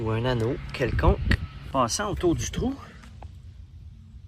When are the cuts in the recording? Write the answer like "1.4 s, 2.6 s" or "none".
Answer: 1.7 s